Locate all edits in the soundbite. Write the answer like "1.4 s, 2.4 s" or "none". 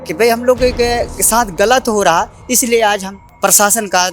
3.2 s